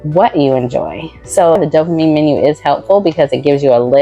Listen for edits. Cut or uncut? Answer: cut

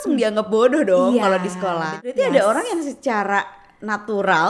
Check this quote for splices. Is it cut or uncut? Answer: cut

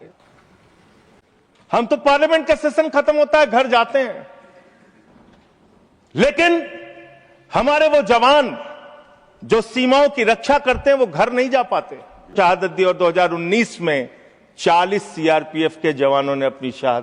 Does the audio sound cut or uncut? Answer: cut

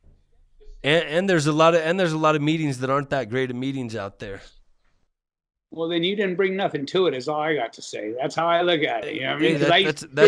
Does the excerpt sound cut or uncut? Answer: uncut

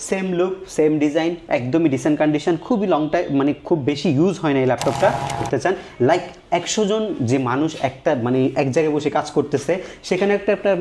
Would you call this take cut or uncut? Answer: cut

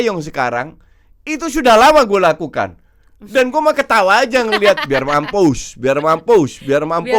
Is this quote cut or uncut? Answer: uncut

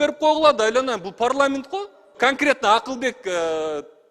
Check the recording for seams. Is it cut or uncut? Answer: cut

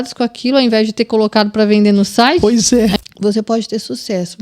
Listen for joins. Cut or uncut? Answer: cut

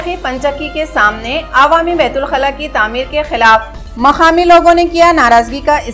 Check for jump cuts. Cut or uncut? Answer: uncut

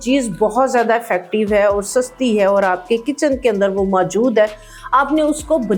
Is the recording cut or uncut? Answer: uncut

